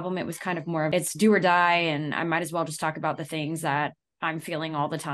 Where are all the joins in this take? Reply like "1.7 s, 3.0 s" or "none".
0.9 s